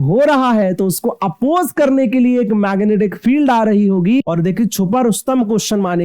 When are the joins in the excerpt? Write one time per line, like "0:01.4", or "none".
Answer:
0:04.2